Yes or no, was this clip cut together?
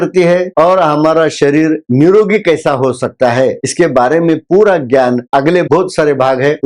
yes